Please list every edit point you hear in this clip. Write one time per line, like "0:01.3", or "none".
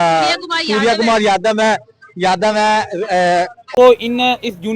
0:03.7

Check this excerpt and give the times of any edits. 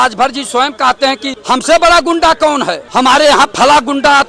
0:01.3
0:02.8

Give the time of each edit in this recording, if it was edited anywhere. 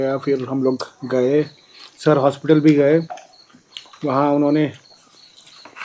none

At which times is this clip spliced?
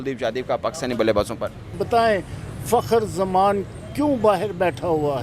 0:01.8

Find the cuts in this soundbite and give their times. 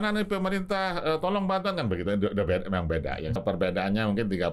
0:03.4

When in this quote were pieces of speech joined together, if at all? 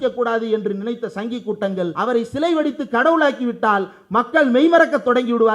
0:01.9

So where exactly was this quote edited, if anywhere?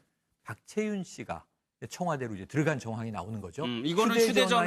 0:02.0

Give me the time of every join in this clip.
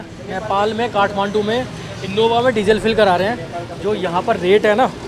none

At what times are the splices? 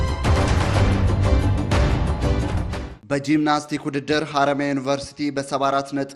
0:02.5

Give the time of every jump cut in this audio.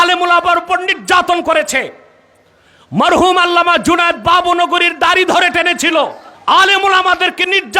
0:06.3

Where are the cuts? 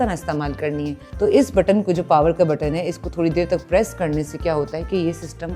0:01.0

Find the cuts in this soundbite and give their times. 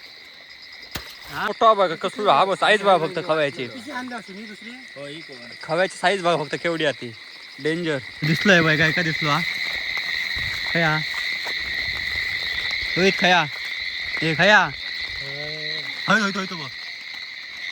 0:01.5
0:08.1

